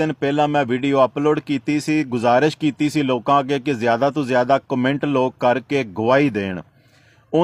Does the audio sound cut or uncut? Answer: uncut